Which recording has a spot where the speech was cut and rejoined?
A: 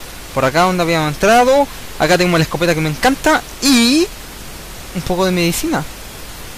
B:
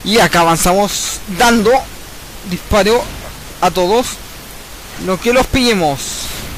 A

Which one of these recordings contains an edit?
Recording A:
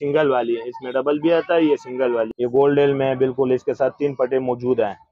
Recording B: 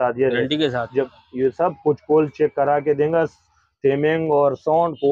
A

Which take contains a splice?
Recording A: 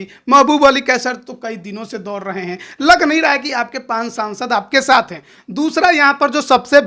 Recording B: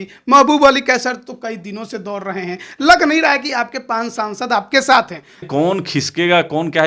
B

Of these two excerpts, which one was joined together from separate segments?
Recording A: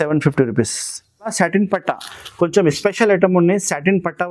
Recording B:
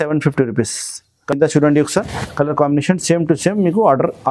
A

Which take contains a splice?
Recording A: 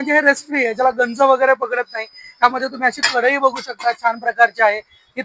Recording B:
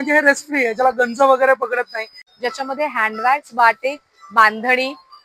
B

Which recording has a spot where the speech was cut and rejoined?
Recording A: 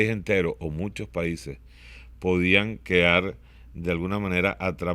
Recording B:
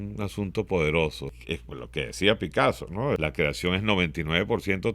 B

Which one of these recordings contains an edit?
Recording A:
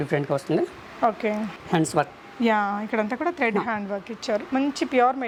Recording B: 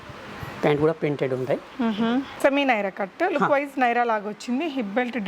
B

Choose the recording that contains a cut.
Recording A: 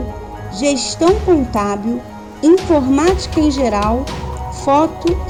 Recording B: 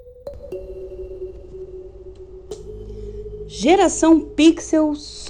B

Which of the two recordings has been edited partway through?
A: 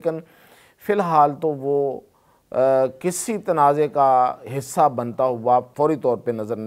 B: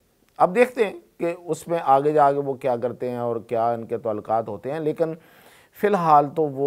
A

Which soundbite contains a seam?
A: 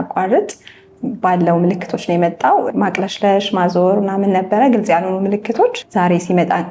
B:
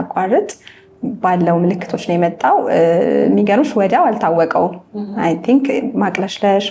A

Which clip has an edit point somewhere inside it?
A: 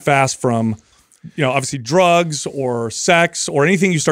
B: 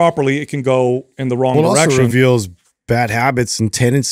B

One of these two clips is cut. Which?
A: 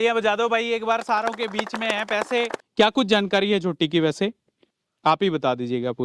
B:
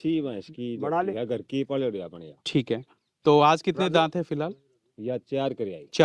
A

